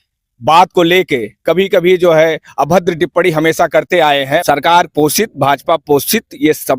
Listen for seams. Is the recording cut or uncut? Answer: cut